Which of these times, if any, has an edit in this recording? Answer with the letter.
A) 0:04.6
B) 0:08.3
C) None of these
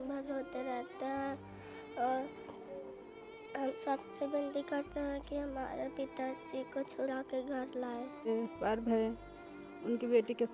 B